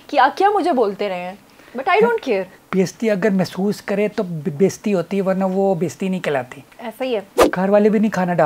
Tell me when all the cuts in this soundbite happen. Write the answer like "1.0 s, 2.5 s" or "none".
2.6 s, 7.4 s